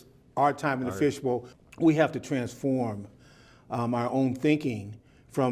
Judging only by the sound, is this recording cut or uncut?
cut